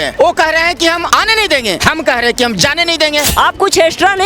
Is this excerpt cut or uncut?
cut